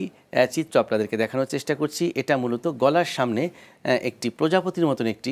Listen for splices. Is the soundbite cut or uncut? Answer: uncut